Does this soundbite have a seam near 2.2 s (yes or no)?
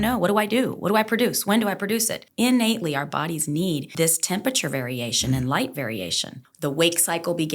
yes